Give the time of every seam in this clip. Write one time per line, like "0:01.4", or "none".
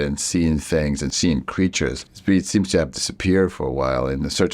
0:01.1
0:02.1